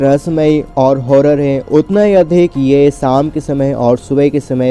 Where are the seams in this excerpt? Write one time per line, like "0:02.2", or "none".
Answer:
none